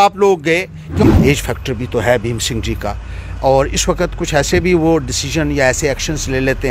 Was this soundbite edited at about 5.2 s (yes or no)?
no